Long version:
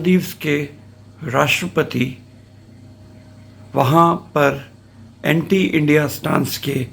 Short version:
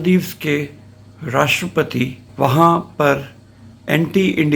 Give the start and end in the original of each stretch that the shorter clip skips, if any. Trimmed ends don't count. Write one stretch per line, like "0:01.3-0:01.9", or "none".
0:02.2-0:03.6